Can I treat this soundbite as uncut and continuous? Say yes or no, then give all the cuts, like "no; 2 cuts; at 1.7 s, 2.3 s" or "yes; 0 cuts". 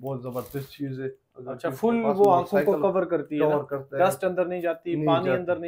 yes; 0 cuts